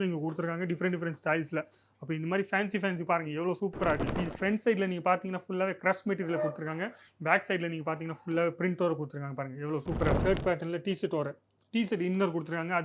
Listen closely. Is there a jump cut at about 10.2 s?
yes; 2 cuts; at 4.1 s, 10.2 s

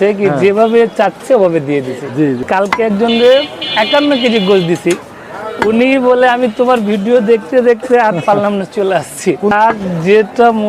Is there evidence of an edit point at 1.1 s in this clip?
no; 2 cuts; at 2.4 s, 9.5 s

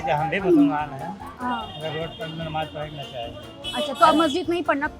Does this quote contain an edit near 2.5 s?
no; 0 cuts

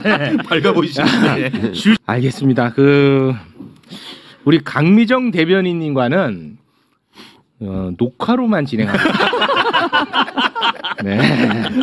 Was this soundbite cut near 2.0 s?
yes; 1 cut; at 2.0 s

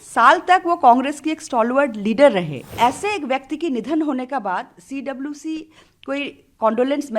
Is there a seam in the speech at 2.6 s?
yes; 1 cut; at 2.6 s

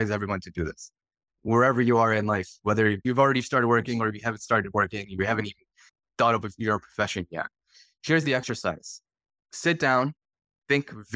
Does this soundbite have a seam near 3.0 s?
yes; 1 cut; at 3.0 s

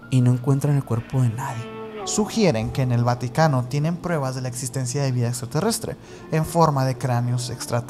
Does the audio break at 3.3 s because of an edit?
no; 1 cut; at 2.0 s

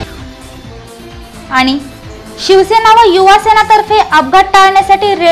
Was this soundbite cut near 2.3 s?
no; 1 cut; at 1.0 s

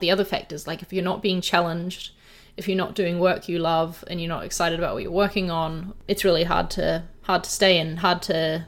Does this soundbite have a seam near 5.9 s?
yes; 1 cut; at 5.9 s

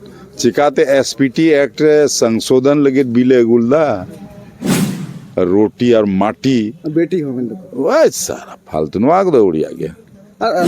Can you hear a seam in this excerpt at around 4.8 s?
yes; 1 cut; at 4.8 s

